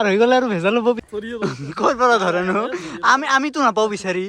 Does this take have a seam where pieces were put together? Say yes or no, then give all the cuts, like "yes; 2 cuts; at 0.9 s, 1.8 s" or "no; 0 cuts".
yes; 1 cut; at 1.0 s